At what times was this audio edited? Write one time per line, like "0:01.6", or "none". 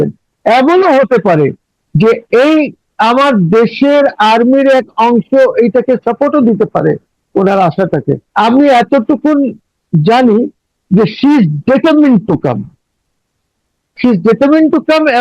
0:08.2